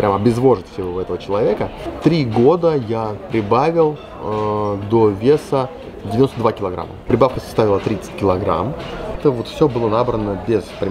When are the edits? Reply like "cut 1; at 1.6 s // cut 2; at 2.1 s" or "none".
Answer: cut 1; at 1.9 s // cut 2; at 9.2 s